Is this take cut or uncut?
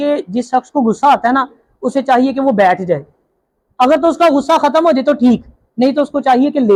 uncut